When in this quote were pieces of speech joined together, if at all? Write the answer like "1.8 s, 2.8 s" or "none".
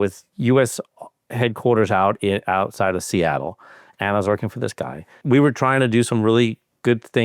5.2 s